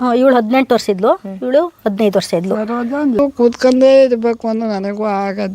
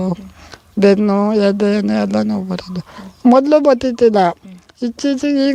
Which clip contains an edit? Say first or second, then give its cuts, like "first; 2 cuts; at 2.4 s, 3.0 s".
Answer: first; 1 cut; at 3.2 s